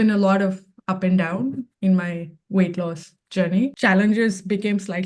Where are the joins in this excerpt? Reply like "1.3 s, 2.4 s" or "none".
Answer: 3.7 s